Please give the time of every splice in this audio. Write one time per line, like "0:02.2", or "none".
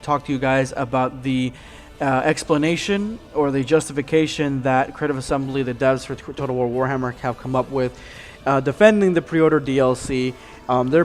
0:03.3